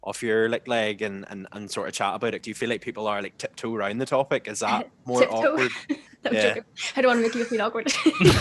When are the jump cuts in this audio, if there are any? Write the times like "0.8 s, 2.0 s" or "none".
2.4 s